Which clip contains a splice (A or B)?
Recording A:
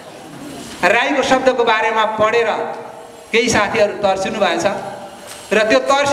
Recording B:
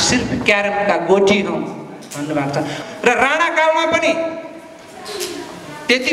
B